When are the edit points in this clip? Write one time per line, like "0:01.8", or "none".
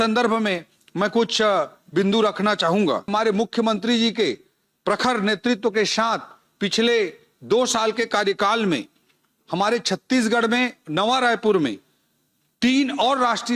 0:03.1